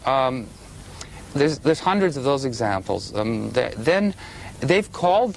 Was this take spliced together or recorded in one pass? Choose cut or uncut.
cut